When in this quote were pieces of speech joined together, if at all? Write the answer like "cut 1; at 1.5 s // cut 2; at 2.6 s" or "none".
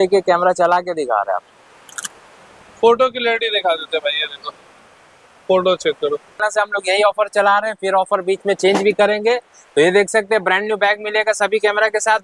cut 1; at 6.4 s